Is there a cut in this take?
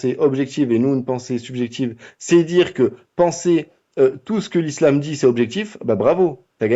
no; 0 cuts

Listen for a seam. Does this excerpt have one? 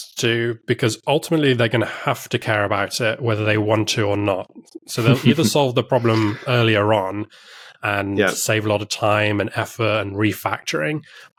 no; 0 cuts

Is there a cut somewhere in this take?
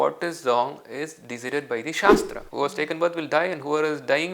yes; 1 cut; at 2.4 s

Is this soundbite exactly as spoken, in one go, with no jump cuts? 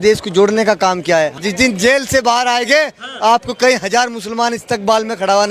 no; 1 cut; at 1.3 s

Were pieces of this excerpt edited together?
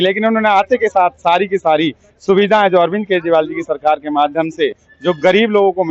no; 0 cuts

